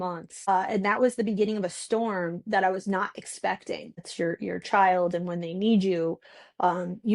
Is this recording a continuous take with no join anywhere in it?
no; 1 cut; at 4.0 s

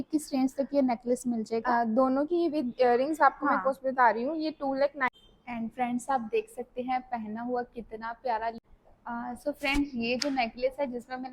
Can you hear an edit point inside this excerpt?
yes; 2 cuts; at 5.1 s, 8.6 s

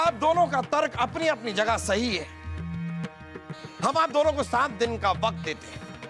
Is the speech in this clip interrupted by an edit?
no; 0 cuts

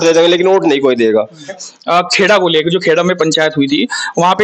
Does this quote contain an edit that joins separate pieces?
yes; 1 cut; at 1.6 s

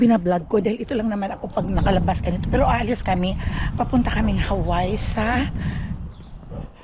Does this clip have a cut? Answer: no; 0 cuts

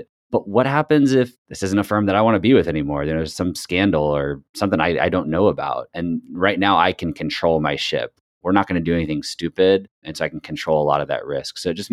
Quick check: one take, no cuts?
no; 1 cut; at 1.4 s

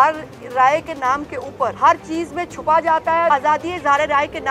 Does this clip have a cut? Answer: yes; 2 cuts; at 1.7 s, 3.3 s

